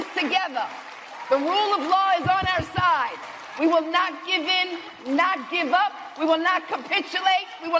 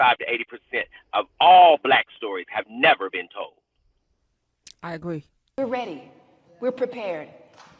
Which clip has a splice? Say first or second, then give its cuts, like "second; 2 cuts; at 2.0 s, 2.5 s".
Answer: second; 1 cut; at 5.4 s